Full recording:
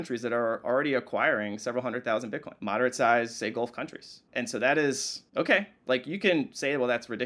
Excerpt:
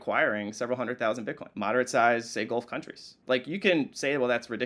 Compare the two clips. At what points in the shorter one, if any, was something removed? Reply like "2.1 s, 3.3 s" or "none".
3.1 s